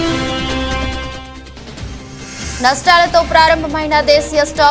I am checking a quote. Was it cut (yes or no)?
yes